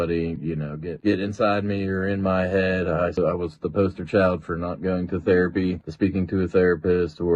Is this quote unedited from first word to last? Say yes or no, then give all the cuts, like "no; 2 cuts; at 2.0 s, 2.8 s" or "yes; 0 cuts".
no; 1 cut; at 3.2 s